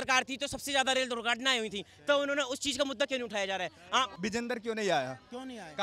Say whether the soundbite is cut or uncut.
cut